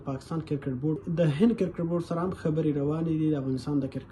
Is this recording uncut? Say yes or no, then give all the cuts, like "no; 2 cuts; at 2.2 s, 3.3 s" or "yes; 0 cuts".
no; 1 cut; at 1.0 s